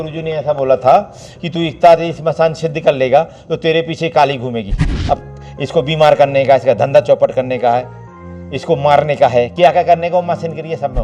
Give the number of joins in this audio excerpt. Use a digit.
1